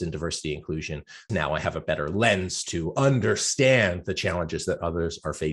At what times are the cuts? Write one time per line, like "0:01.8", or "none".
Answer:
0:01.3

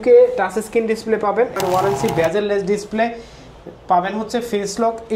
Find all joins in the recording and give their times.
0:01.6

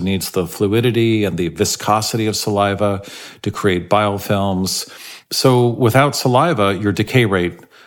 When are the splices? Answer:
0:05.2

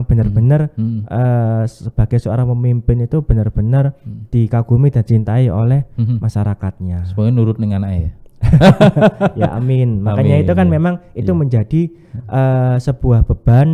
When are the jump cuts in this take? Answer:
none

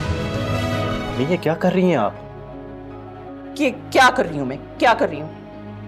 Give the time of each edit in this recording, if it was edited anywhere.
0:01.1

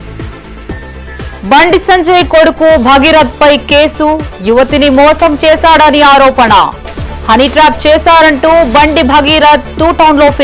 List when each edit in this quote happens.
0:01.0

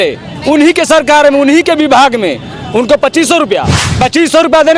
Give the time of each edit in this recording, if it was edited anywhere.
0:03.8

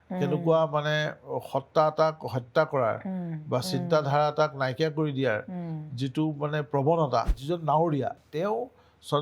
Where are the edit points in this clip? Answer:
0:07.3
0:08.2

